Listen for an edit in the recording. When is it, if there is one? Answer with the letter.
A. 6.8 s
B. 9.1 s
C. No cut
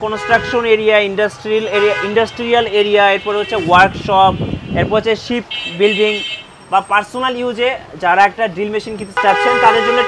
B